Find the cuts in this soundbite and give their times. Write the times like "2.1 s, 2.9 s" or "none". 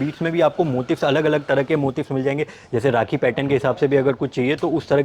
none